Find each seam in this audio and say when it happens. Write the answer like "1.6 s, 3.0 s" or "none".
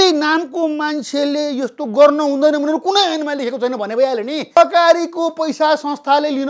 4.6 s